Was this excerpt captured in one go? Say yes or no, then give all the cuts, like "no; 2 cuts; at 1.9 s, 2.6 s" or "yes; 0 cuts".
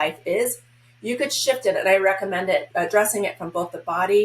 no; 1 cut; at 2.7 s